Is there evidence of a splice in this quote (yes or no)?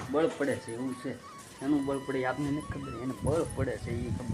no